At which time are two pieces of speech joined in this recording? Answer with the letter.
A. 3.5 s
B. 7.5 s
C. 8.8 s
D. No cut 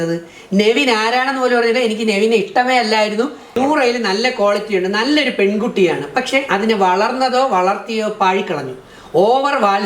A